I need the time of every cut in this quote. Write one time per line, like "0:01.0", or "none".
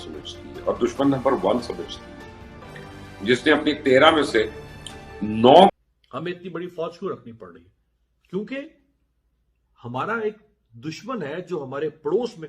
0:05.8